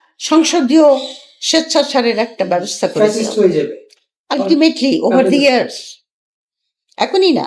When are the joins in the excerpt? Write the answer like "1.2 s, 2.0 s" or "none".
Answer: none